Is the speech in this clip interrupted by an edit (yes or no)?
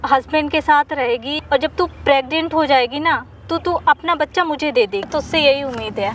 yes